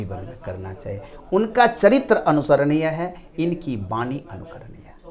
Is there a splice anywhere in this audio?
no; 0 cuts

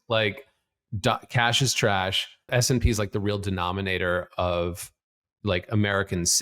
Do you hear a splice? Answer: yes; 1 cut; at 2.5 s

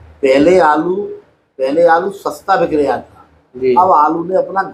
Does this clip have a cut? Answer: no; 0 cuts

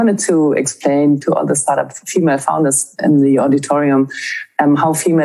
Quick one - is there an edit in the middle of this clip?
yes; 2 cuts; at 1.2 s, 3.0 s

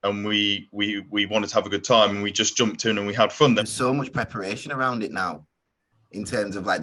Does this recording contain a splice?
yes; 1 cut; at 3.6 s

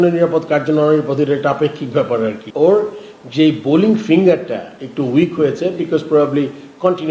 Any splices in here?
yes; 1 cut; at 2.4 s

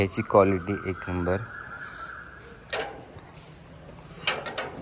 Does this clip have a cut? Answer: no; 0 cuts

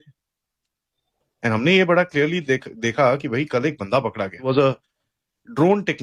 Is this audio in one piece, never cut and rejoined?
no; 1 cut; at 4.4 s

